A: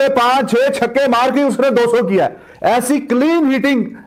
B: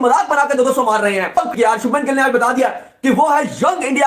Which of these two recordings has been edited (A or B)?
B